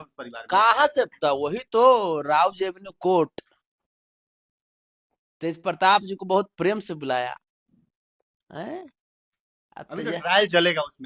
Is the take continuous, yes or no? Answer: yes